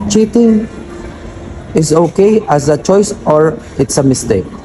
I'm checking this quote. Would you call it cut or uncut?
uncut